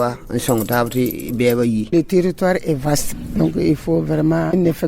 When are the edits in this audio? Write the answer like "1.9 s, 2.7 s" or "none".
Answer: 1.9 s